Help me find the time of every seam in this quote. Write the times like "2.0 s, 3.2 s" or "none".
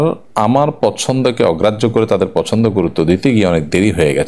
none